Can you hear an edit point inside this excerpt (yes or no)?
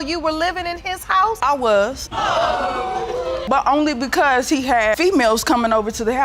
no